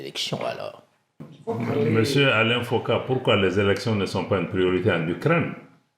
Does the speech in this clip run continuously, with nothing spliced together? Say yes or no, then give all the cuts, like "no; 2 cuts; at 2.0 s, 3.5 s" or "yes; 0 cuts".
no; 1 cut; at 1.3 s